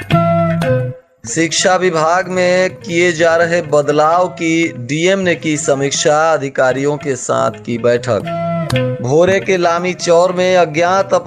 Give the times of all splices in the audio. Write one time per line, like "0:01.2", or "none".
0:01.1